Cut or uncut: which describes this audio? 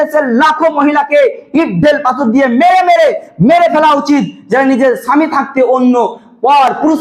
uncut